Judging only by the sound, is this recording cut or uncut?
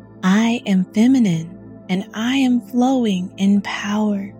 uncut